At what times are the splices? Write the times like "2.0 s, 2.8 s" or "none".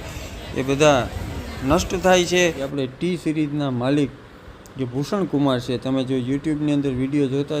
2.7 s